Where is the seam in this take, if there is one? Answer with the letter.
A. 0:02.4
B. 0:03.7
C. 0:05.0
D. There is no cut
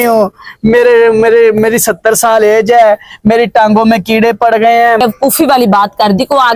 C